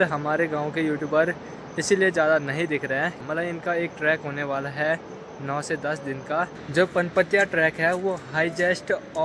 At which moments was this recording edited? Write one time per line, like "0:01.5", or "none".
0:03.2
0:06.5